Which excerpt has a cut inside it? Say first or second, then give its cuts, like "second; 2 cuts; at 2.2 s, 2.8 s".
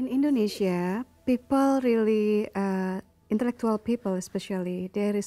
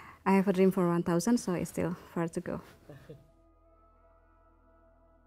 first; 1 cut; at 3.1 s